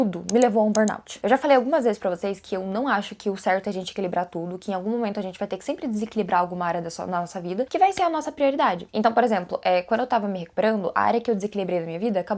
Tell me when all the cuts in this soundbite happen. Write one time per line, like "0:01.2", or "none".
none